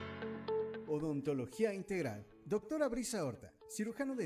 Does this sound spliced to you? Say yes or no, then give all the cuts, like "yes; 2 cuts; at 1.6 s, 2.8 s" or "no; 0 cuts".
no; 0 cuts